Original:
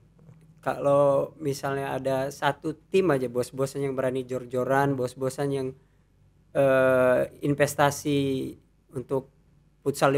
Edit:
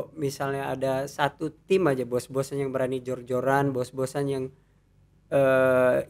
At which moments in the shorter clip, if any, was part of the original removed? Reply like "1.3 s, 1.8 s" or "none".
none